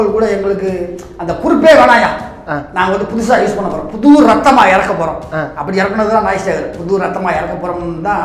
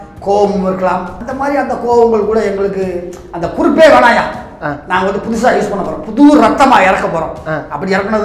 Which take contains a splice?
second; 1 cut; at 1.2 s

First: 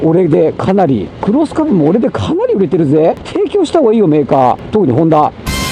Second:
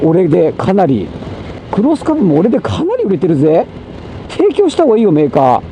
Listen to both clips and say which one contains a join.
first; 3 cuts; at 1.1 s, 3.2 s, 4.6 s

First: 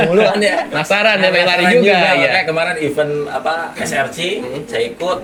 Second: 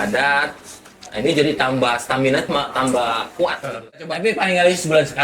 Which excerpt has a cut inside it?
second; 1 cut; at 4.0 s

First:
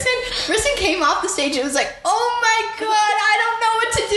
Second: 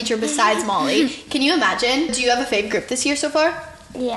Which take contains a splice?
second; 1 cut; at 2.2 s

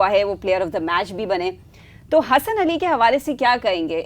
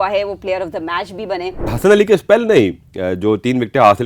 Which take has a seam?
second; 1 cut; at 1.7 s

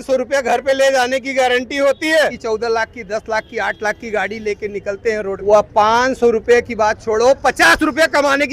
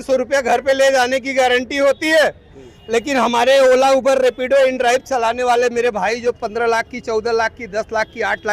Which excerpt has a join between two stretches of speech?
first; 2 cuts; at 2.4 s, 5.4 s

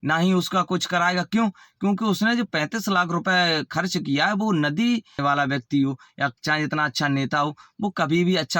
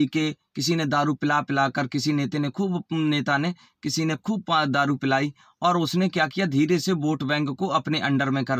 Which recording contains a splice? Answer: first; 1 cut; at 5.2 s

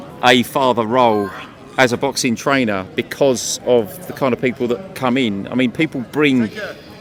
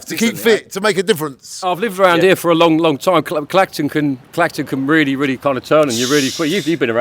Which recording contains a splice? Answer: second; 1 cut; at 1.5 s

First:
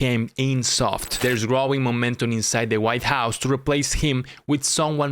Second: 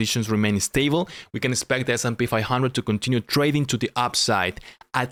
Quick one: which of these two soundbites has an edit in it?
first; 1 cut; at 1.2 s

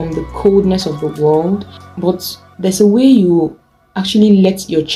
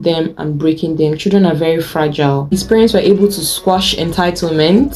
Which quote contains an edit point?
second; 1 cut; at 2.6 s

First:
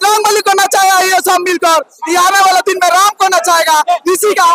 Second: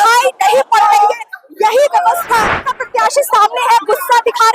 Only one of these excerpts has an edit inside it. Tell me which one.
second; 1 cut; at 2.7 s

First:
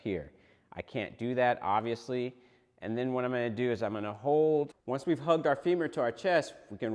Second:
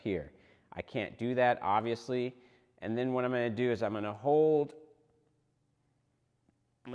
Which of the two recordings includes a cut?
first; 1 cut; at 4.8 s

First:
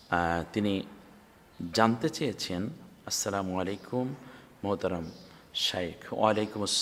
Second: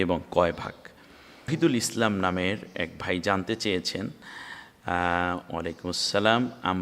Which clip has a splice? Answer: second; 1 cut; at 1.5 s

